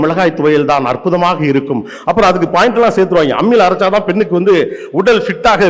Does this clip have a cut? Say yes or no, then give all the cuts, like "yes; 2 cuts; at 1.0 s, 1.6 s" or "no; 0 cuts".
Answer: no; 0 cuts